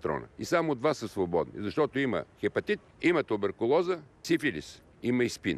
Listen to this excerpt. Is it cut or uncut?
cut